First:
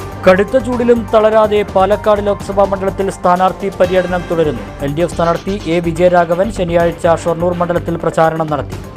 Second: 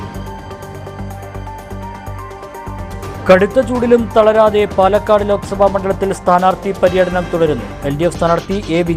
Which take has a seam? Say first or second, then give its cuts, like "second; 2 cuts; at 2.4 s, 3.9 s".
second; 1 cut; at 1.2 s